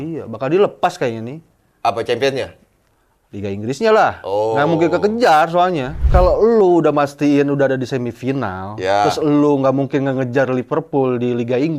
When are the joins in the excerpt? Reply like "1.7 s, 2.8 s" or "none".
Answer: 5.9 s